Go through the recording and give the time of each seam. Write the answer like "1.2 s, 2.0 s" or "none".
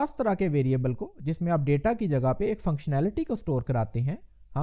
none